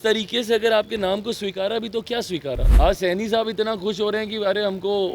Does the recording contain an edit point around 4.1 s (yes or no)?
no